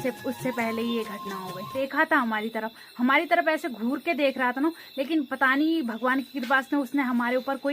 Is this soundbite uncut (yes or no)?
no